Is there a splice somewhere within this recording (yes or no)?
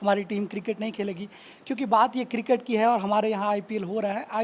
no